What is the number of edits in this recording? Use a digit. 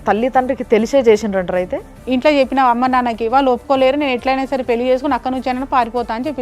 1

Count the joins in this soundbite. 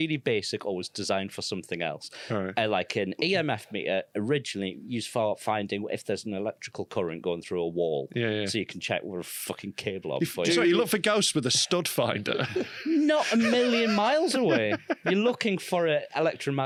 0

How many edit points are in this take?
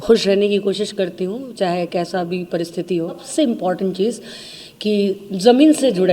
1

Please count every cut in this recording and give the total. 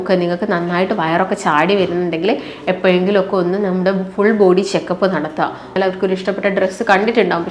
1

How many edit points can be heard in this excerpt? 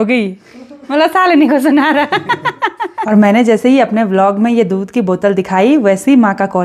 1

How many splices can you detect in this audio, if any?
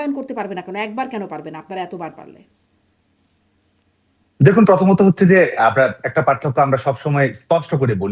0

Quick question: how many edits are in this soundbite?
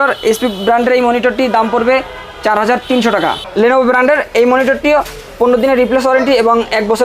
1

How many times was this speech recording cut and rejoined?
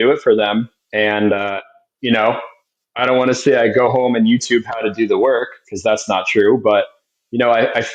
0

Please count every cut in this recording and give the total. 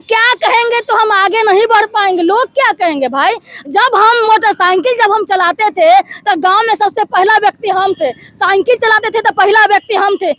0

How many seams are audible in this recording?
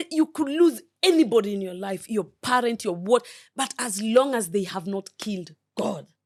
0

